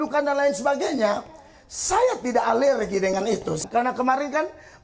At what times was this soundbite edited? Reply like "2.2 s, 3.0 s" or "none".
3.6 s